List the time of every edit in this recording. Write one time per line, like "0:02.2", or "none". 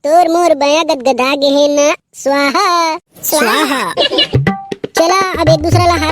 0:04.3